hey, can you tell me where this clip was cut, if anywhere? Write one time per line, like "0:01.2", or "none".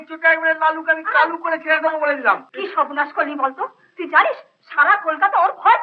0:02.5